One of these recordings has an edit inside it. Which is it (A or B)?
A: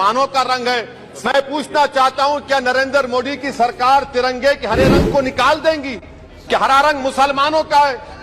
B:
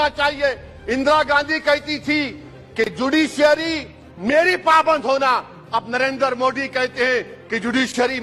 A